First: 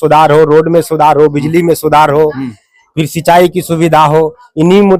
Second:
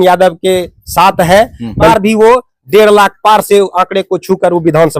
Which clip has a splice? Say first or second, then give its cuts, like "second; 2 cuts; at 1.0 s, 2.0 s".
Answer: second; 1 cut; at 1.9 s